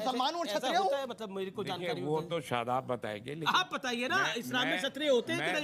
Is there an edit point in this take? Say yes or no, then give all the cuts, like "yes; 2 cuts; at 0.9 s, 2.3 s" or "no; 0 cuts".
no; 0 cuts